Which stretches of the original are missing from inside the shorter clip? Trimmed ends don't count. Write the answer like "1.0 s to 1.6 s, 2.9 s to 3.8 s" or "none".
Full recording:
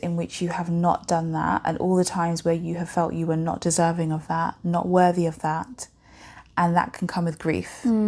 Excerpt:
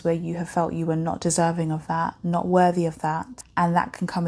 5.8 s to 6.4 s